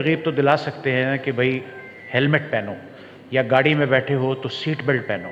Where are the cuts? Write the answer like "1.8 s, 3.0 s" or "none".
none